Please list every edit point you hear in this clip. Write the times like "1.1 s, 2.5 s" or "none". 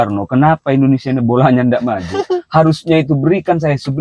none